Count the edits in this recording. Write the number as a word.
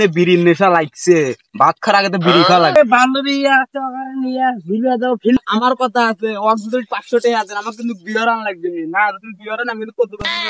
two